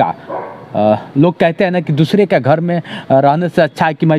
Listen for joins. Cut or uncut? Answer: uncut